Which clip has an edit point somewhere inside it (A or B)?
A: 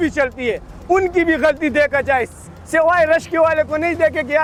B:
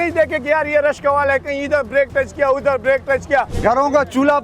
B